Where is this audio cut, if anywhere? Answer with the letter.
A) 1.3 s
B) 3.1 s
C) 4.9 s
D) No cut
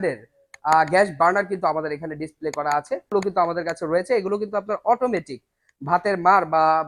B